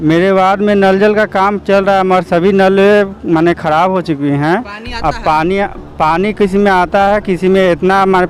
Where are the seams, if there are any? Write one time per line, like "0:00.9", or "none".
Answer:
none